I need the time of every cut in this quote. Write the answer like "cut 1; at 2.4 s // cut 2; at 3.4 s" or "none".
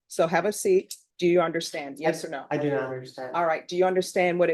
cut 1; at 1.0 s